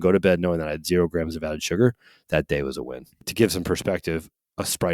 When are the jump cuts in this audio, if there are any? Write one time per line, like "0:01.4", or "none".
0:03.3